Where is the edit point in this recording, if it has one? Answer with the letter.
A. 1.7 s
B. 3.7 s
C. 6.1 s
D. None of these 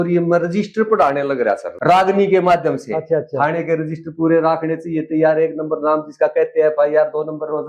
A